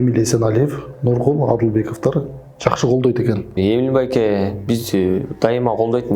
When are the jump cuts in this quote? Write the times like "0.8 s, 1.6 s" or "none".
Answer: 3.5 s